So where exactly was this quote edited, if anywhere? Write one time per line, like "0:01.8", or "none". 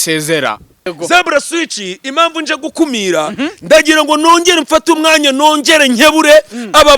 0:00.9